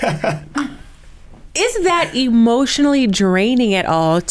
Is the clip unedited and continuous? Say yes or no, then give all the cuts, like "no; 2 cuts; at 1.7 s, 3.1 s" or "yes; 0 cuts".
yes; 0 cuts